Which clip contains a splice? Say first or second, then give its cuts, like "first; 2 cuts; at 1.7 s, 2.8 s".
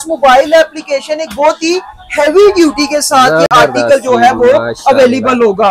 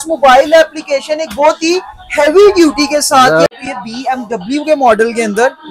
second; 1 cut; at 3.5 s